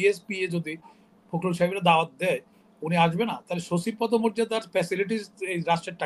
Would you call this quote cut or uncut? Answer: uncut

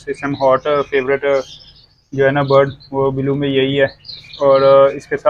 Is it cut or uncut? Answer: uncut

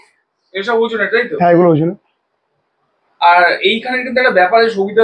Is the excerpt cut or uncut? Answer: uncut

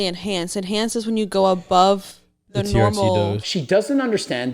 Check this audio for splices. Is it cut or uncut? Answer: cut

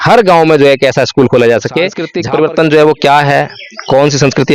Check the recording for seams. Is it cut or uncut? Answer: cut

